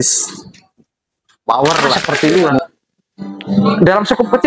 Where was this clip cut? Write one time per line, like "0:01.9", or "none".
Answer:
0:02.0